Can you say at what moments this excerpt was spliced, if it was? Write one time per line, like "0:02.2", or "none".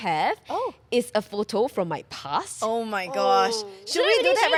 none